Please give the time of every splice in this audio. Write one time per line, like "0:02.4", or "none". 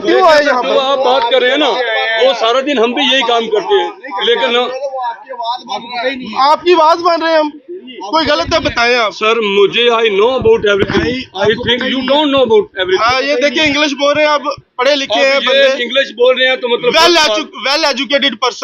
none